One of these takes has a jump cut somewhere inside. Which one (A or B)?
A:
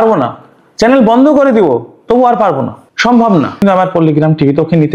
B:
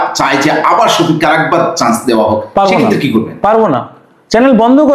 A